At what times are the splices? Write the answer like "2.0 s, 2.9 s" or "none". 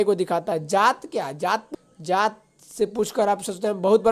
1.7 s